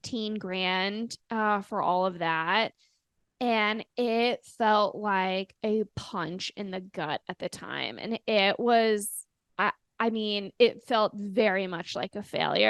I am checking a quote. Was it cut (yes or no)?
no